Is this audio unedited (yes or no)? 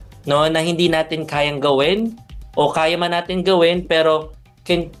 yes